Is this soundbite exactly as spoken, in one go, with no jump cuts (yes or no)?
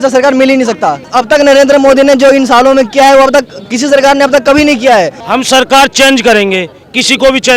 no